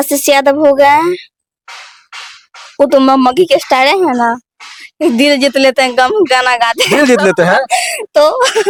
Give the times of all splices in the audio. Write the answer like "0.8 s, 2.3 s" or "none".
none